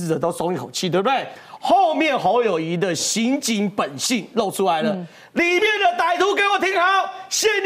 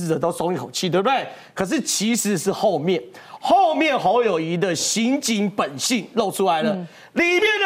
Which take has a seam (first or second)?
first